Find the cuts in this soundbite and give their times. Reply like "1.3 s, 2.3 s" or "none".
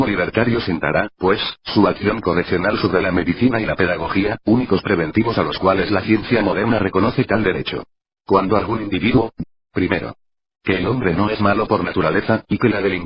none

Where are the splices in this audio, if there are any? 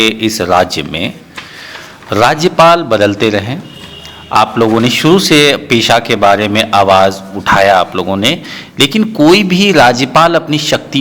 none

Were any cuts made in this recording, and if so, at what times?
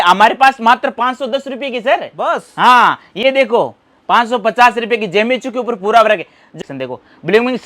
6.5 s

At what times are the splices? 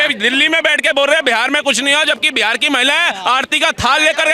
none

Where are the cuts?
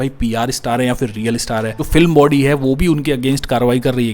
1.8 s

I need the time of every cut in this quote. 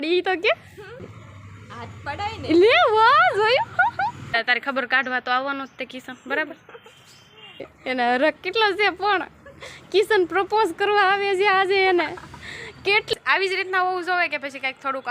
1.1 s, 4.3 s, 7.7 s, 13.1 s

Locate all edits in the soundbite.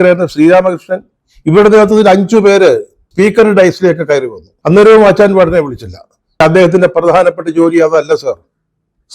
6.4 s

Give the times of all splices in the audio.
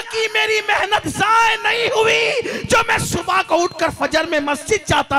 none

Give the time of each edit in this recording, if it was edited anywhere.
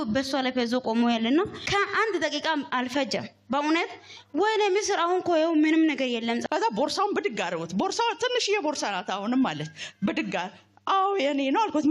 1.6 s, 6.4 s

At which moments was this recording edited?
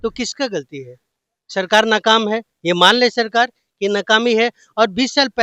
none

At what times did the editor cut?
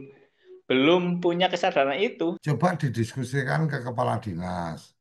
2.4 s

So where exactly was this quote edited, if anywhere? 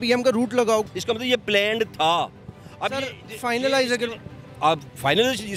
none

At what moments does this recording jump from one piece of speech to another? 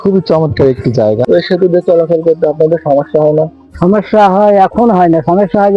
1.3 s

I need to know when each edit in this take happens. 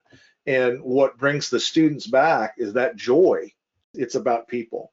3.9 s

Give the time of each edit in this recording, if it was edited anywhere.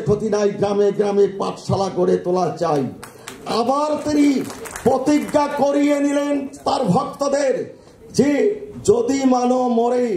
none

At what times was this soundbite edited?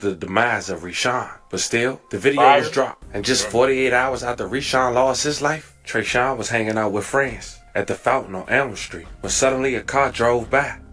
3.1 s

